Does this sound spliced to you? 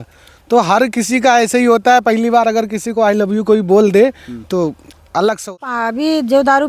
yes; 1 cut; at 5.6 s

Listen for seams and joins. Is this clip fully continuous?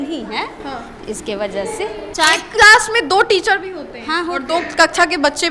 no; 1 cut; at 2.1 s

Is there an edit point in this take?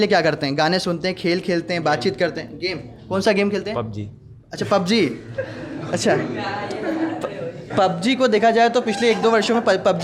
no; 0 cuts

